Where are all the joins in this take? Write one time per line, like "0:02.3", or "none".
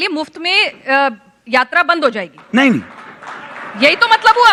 none

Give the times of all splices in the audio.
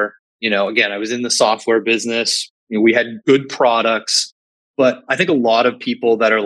0:03.1
0:05.1

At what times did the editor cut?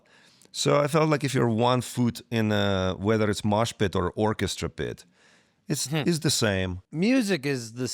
0:06.8

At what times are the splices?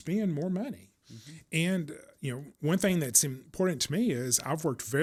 none

